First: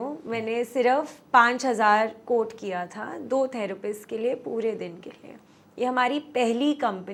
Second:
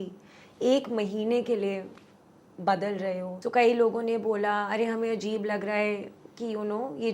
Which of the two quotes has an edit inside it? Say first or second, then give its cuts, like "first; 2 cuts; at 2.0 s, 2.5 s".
second; 1 cut; at 3.3 s